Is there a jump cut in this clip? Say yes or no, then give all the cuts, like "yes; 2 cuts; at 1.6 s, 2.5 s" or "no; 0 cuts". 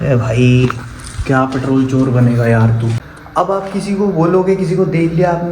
yes; 1 cut; at 3.0 s